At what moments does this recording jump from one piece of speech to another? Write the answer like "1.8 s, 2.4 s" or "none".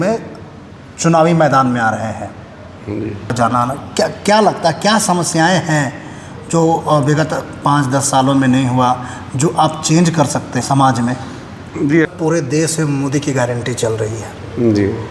3.3 s, 12.1 s